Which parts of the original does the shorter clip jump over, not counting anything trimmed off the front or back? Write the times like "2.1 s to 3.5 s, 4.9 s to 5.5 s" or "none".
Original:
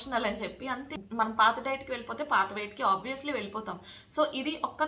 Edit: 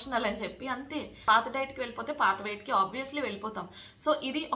1.2 s to 1.3 s